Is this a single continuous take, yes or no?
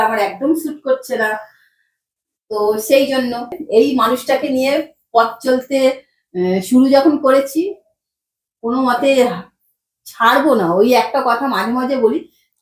no